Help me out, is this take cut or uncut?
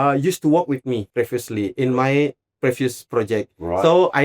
cut